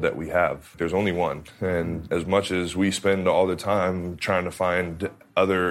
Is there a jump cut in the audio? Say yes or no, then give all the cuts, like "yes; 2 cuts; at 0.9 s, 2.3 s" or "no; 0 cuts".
yes; 2 cuts; at 0.7 s, 2.0 s